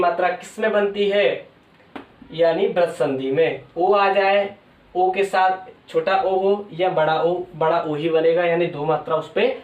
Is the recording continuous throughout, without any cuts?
yes; 0 cuts

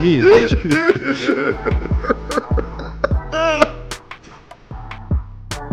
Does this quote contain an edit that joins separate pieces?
yes; 1 cut; at 3.8 s

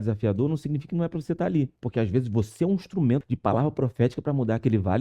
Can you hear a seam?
yes; 2 cuts; at 1.8 s, 3.3 s

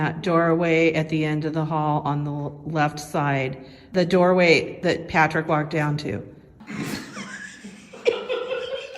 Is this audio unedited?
no; 3 cuts; at 3.9 s, 4.7 s, 6.5 s

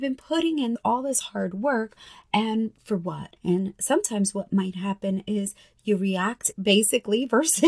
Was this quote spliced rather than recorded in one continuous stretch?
no; 0 cuts

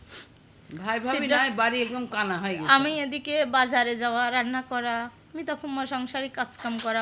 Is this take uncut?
yes; 0 cuts

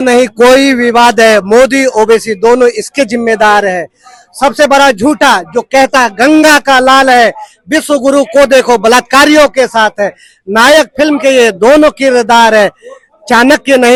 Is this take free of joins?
yes; 0 cuts

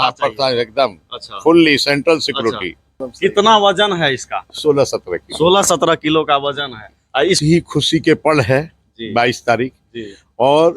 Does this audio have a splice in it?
yes; 2 cuts; at 3.0 s, 7.4 s

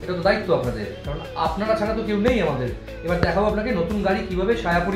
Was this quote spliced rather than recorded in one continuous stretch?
no; 0 cuts

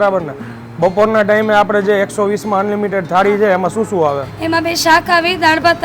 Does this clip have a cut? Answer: no; 0 cuts

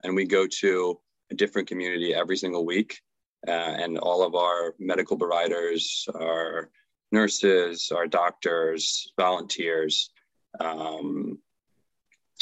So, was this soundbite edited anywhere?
no; 0 cuts

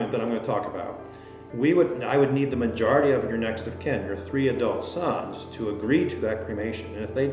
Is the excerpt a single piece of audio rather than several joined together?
yes; 0 cuts

